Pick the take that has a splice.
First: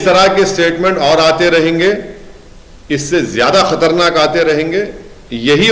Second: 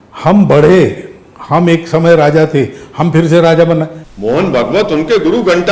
second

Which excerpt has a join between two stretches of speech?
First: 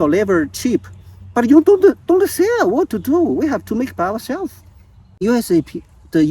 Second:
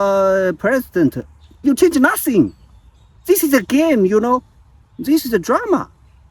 first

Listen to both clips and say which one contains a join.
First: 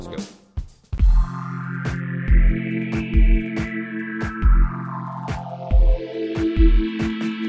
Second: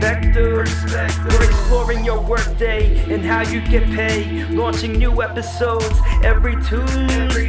first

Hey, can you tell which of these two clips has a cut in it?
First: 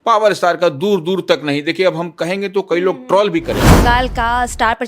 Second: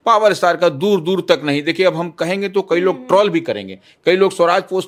first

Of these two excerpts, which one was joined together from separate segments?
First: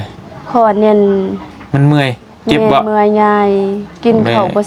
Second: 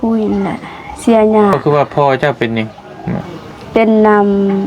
second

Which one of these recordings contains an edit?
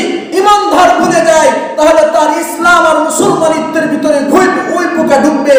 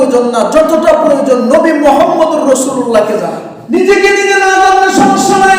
second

